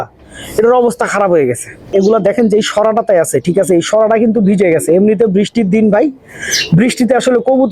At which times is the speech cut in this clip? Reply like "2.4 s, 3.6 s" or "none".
1.9 s